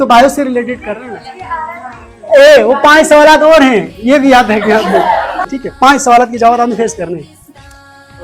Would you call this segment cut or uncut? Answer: uncut